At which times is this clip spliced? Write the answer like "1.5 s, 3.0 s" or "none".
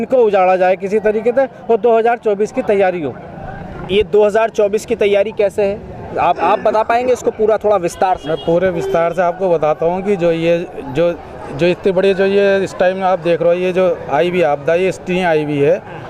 none